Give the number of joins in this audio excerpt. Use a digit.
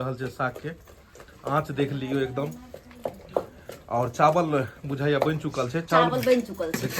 0